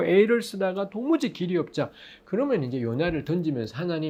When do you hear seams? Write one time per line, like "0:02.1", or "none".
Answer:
none